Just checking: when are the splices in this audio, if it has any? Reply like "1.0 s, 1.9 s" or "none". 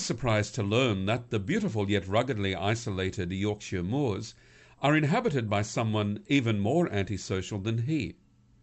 7.4 s